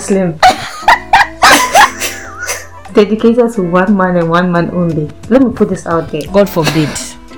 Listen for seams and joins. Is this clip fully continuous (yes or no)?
no